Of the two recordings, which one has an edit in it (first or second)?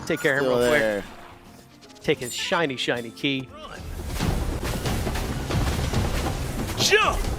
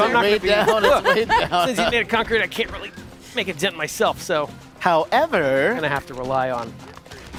first